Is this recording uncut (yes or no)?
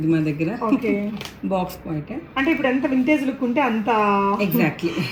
yes